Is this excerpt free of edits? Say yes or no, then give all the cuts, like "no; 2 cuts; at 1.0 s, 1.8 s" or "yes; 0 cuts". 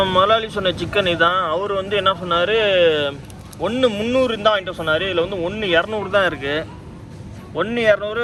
yes; 0 cuts